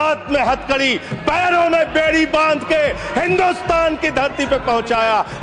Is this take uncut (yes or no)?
yes